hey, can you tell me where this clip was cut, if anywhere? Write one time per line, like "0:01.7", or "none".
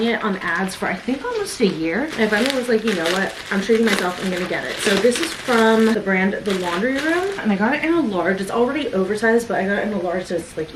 none